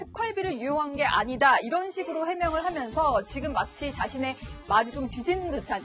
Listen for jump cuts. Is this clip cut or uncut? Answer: cut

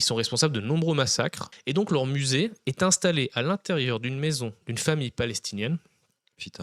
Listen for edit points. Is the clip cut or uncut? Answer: cut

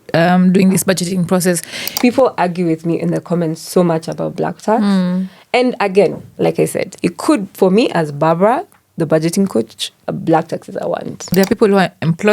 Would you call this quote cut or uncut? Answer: cut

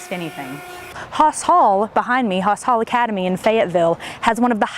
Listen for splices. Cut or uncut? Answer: cut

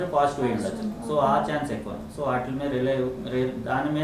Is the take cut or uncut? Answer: uncut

